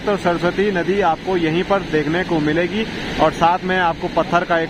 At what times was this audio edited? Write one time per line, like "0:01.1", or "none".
none